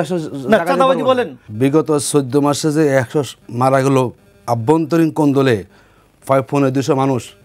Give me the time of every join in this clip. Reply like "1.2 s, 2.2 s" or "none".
1.4 s